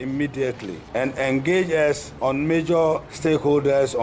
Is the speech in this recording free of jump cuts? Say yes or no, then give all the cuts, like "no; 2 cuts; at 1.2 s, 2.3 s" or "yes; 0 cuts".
yes; 0 cuts